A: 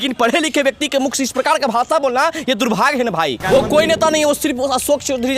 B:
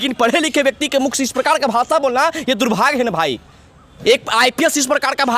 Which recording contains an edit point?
A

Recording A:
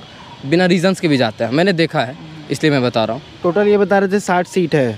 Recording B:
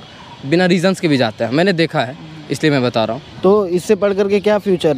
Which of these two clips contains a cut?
B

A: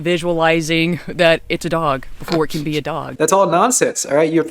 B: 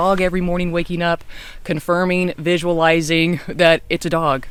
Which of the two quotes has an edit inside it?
A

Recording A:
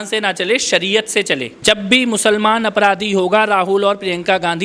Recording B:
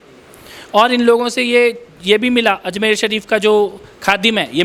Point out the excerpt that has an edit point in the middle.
A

